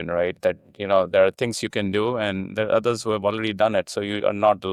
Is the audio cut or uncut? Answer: uncut